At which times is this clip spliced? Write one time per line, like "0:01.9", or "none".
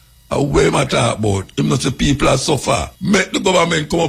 0:02.9